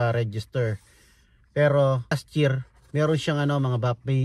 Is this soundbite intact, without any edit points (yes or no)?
no